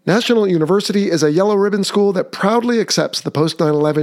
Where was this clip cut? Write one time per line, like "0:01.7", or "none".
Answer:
none